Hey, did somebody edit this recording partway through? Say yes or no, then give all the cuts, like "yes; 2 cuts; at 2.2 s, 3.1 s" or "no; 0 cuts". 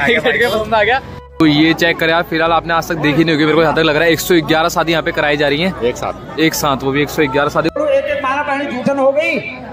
yes; 2 cuts; at 1.2 s, 7.8 s